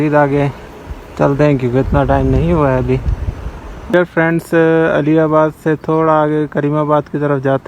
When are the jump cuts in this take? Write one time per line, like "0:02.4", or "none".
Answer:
0:03.9

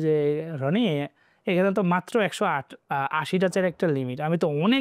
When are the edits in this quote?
none

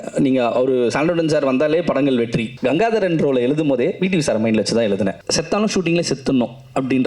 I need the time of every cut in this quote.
0:02.5
0:05.2

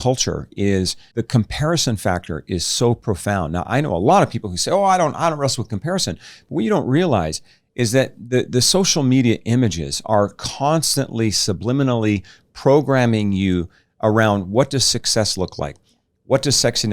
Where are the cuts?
0:01.0

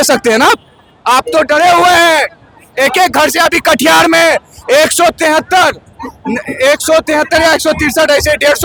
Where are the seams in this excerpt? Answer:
none

